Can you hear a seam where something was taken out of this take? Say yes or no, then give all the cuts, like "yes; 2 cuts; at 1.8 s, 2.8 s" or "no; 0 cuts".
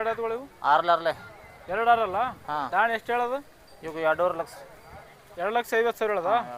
no; 0 cuts